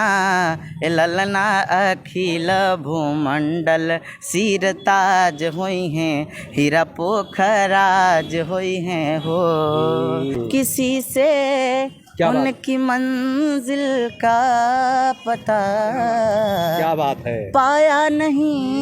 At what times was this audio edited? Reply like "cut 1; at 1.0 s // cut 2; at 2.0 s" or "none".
cut 1; at 10.4 s